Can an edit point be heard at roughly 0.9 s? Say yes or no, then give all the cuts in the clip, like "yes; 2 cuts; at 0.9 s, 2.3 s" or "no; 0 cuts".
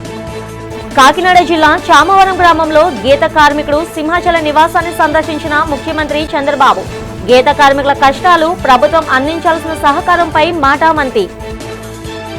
yes; 1 cut; at 0.9 s